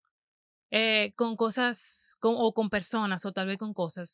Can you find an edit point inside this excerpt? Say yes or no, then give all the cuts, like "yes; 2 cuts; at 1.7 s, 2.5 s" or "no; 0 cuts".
no; 0 cuts